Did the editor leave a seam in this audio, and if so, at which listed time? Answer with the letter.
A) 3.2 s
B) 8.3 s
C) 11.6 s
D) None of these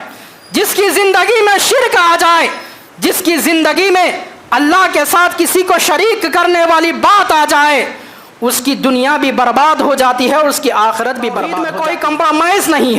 C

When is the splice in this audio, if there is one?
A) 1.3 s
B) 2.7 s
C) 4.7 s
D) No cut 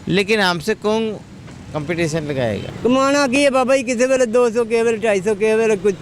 B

